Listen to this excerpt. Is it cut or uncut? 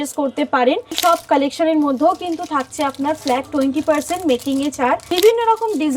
cut